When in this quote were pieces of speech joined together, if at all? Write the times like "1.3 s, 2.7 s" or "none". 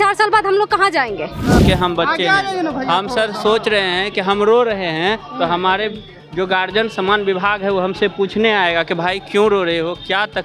1.6 s